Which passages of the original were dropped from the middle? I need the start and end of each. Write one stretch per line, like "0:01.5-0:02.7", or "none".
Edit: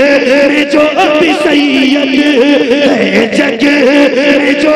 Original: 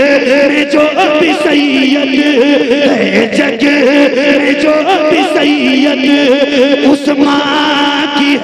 none